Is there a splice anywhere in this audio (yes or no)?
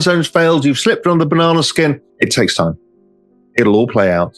yes